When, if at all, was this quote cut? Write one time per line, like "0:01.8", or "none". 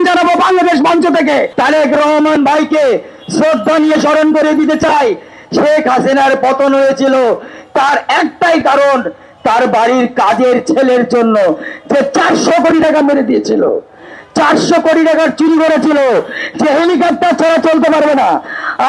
0:01.5